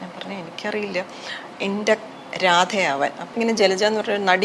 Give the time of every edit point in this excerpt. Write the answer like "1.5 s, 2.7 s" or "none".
3.3 s

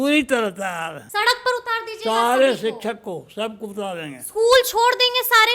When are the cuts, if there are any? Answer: 1.0 s

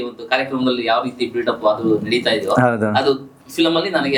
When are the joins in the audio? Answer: none

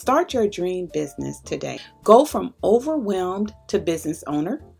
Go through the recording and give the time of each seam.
1.9 s

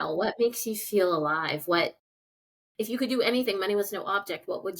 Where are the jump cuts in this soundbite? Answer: none

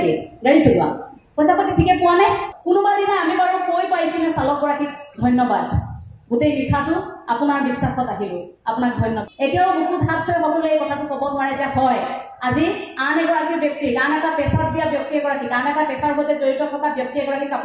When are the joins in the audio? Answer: 2.5 s, 9.2 s

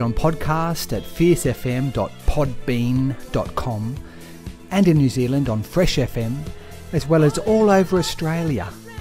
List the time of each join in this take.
none

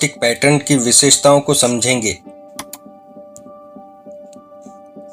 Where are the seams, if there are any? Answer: none

